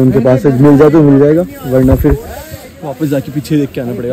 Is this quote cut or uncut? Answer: uncut